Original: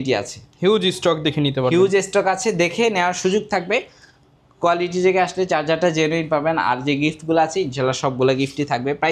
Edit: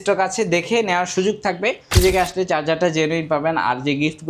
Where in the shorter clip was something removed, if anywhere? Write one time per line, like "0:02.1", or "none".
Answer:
0:01.9